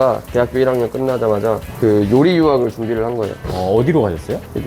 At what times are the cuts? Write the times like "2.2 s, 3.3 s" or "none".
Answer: 1.7 s, 3.4 s